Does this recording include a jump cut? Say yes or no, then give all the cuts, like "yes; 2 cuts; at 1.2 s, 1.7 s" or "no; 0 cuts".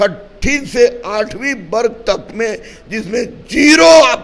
no; 0 cuts